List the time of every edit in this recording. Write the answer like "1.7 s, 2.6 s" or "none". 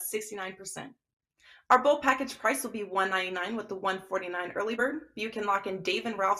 4.7 s